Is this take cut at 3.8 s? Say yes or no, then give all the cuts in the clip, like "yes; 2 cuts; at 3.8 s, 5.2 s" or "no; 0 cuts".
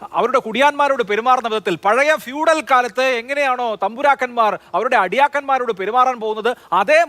no; 0 cuts